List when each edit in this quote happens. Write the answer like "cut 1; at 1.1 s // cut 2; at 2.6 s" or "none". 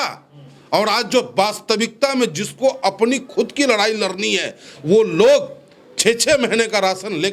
none